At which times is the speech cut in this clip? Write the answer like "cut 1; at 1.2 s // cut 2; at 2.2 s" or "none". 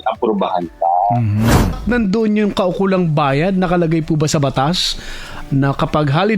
cut 1; at 1.8 s